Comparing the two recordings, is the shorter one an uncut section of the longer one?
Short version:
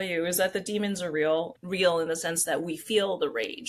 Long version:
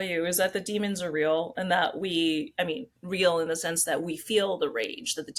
no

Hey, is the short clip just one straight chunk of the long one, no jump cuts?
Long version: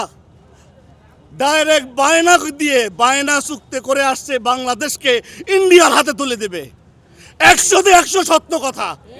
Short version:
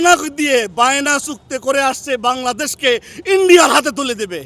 yes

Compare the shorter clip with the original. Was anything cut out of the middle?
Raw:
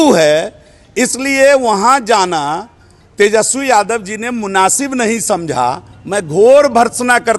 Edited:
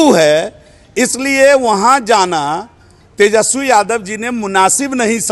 no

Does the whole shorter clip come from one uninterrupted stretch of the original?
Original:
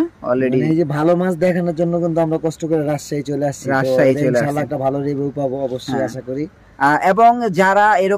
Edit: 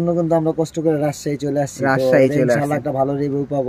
yes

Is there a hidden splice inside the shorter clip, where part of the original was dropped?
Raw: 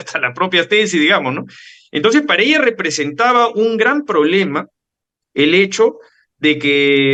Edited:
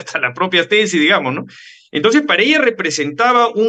no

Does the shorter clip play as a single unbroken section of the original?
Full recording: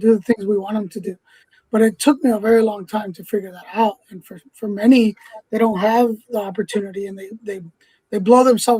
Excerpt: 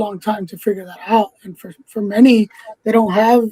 yes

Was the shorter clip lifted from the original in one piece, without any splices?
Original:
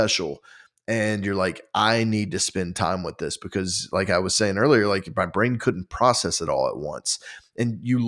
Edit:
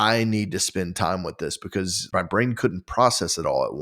no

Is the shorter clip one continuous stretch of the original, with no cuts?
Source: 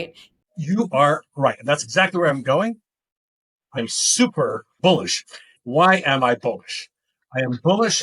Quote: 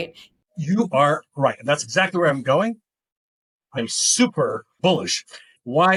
yes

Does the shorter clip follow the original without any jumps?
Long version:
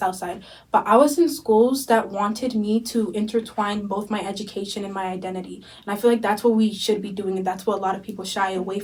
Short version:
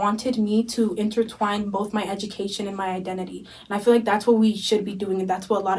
yes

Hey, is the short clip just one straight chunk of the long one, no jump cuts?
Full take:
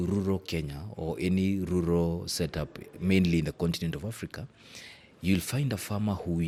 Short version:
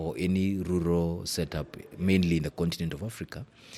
yes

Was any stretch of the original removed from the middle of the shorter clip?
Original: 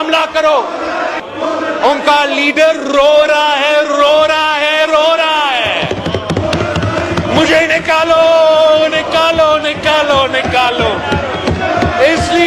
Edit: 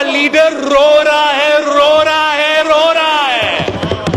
no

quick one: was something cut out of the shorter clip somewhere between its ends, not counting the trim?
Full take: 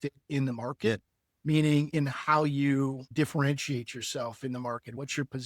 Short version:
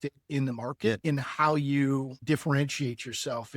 yes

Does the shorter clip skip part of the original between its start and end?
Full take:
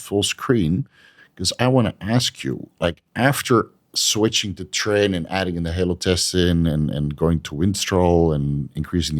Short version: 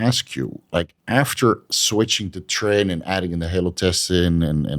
yes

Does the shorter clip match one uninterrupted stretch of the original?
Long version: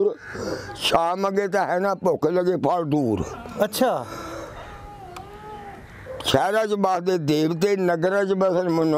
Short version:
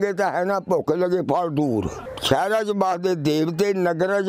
no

